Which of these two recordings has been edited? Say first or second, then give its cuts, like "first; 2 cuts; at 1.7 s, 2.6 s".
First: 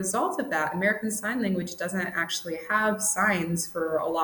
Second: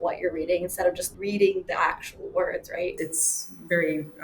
second; 2 cuts; at 1.1 s, 2.9 s